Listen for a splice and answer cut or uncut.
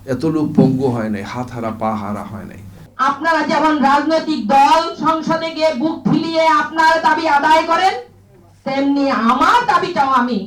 cut